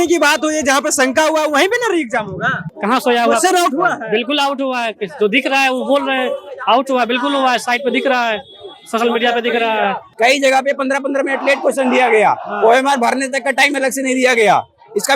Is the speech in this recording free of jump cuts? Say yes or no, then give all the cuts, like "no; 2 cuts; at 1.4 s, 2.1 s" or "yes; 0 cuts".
no; 2 cuts; at 2.7 s, 10.1 s